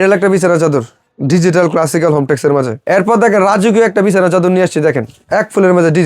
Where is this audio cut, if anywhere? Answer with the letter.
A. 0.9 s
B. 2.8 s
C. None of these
B